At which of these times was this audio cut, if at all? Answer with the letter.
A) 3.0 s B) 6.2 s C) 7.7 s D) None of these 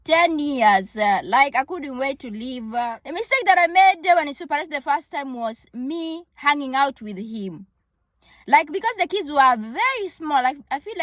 A